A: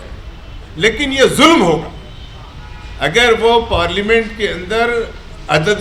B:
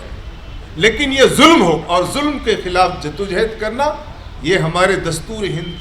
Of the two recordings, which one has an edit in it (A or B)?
B